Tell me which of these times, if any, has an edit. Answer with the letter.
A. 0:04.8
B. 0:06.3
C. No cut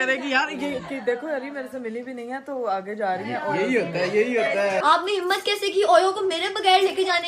A